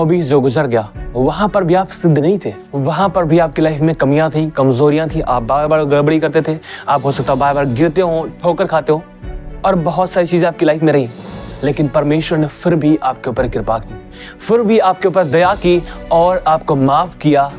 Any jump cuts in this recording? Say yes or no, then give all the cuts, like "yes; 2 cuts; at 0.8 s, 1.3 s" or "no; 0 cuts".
yes; 1 cut; at 2.6 s